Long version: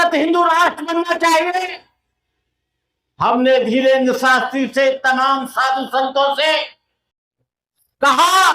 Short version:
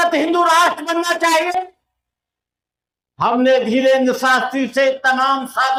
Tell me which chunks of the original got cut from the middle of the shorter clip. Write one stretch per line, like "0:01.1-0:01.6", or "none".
none